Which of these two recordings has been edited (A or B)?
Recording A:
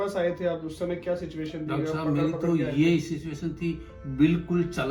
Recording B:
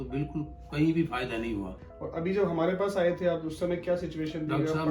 B